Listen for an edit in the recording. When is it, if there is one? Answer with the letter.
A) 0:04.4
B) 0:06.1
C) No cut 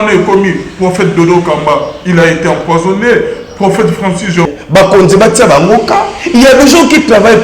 A